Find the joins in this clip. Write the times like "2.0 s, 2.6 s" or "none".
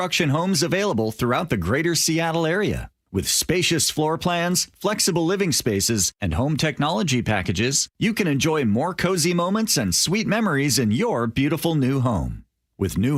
none